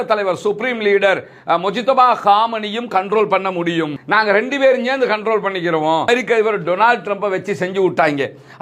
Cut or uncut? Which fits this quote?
cut